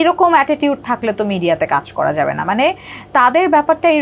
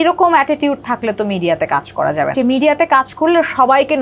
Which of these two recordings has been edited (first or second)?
second